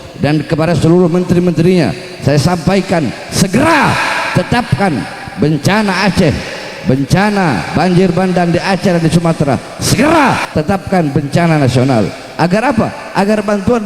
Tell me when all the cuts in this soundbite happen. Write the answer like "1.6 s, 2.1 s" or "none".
10.5 s